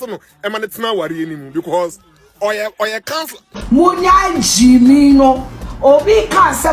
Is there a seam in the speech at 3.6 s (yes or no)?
yes